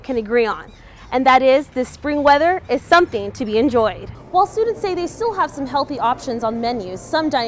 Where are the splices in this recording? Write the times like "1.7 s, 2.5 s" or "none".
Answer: 4.1 s